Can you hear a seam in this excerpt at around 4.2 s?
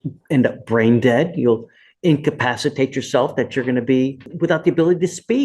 yes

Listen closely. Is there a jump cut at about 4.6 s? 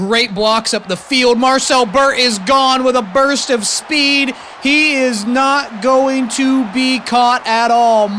no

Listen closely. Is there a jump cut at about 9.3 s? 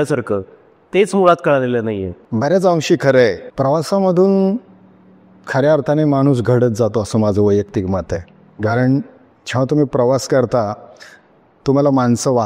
no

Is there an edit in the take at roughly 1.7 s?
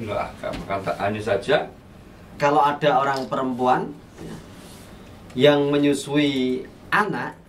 yes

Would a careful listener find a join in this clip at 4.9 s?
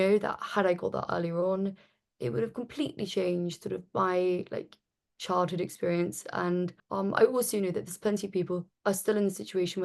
no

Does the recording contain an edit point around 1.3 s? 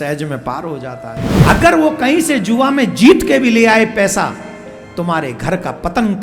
yes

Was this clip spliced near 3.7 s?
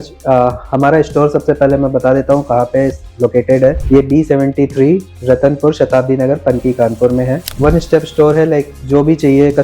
no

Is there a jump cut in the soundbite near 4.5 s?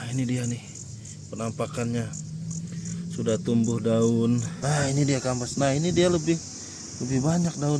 yes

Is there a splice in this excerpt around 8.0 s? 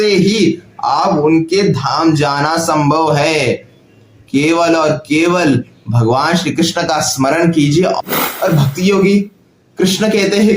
yes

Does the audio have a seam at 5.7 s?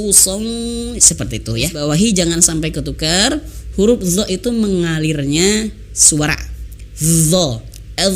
no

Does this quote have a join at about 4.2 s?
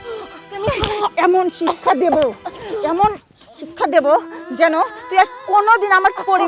no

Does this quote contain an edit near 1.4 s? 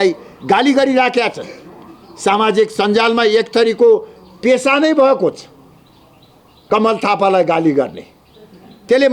no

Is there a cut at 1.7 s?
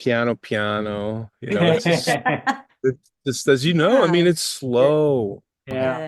no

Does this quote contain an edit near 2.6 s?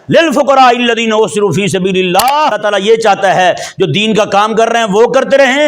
yes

